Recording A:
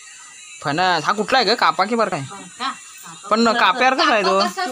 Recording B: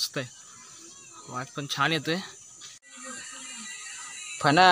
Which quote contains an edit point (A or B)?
B